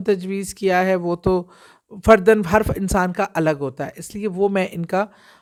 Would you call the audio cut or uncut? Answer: uncut